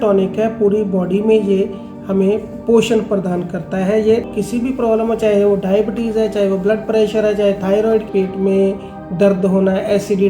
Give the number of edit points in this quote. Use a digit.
2